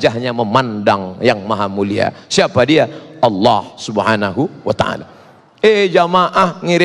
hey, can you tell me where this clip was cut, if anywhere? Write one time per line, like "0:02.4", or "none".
none